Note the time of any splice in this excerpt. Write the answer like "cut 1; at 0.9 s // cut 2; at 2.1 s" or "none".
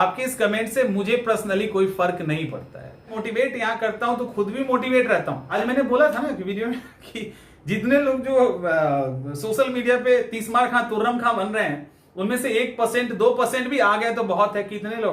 cut 1; at 3.2 s // cut 2; at 5.4 s